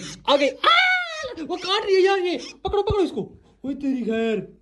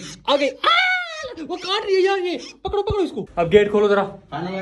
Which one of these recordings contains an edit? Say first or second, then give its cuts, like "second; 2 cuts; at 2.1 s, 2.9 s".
second; 1 cut; at 3.2 s